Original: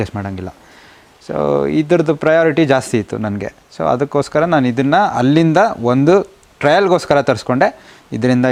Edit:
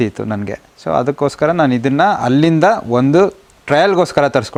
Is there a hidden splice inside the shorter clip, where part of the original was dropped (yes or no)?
no